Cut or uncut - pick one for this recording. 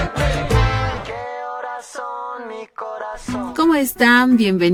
uncut